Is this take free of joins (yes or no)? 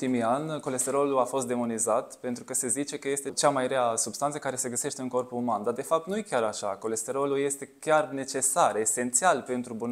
yes